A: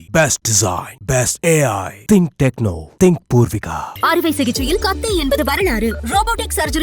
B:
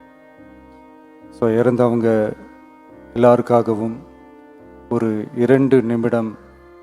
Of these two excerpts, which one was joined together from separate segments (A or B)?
B